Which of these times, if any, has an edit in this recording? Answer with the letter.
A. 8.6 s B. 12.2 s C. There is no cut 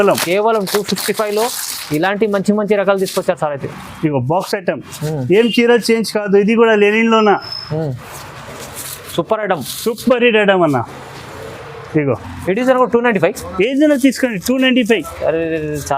B